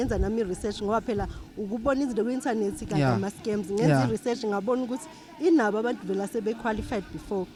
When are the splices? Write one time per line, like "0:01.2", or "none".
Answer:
none